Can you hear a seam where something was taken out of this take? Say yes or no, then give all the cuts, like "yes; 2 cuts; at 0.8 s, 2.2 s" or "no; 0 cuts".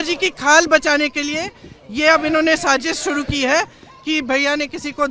no; 0 cuts